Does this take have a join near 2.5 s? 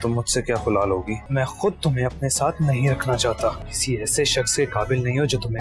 no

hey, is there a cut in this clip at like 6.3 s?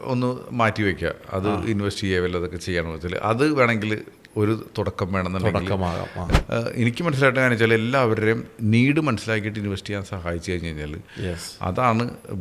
yes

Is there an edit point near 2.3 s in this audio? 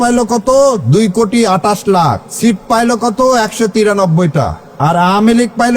yes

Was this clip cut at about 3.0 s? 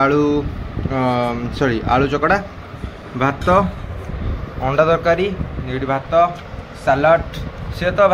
no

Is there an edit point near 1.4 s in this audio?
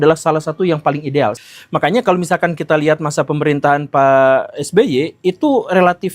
yes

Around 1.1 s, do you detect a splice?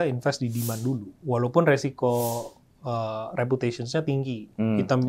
yes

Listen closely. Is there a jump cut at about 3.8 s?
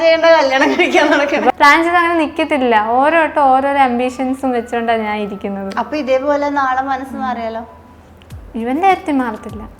no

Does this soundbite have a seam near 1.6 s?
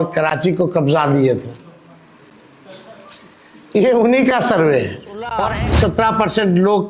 no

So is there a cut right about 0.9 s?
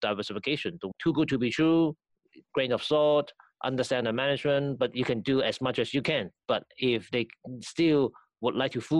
yes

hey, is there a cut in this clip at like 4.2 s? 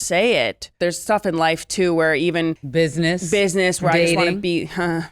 no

